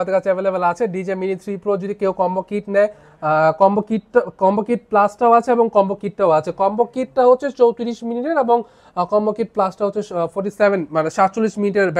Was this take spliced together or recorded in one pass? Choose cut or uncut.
uncut